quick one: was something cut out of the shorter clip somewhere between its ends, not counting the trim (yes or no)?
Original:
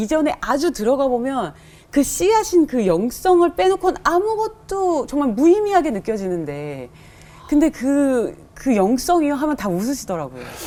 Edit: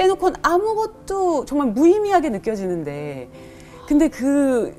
no